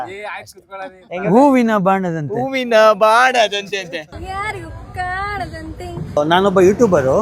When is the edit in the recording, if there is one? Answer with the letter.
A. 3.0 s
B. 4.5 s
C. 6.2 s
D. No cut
C